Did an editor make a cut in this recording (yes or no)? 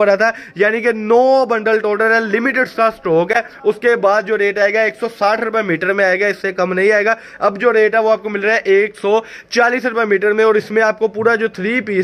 no